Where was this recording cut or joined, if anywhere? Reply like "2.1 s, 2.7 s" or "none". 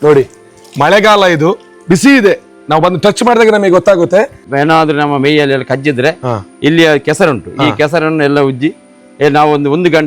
4.3 s

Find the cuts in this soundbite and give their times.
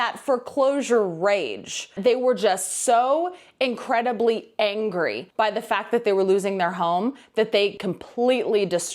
1.9 s, 7.8 s

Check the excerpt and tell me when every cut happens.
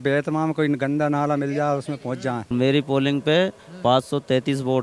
2.5 s

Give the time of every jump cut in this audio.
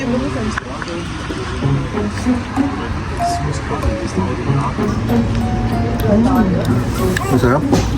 4.9 s

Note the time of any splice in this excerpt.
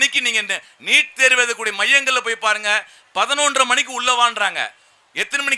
none

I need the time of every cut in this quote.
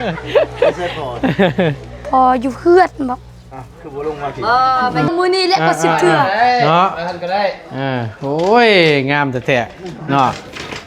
5.1 s

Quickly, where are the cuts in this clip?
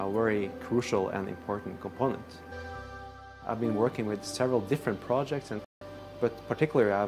2.5 s, 5.7 s

